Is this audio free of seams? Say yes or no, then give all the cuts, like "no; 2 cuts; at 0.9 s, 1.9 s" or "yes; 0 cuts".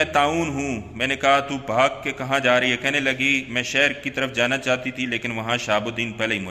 yes; 0 cuts